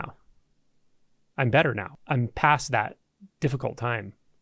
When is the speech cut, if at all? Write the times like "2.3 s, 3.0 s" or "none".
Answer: 1.9 s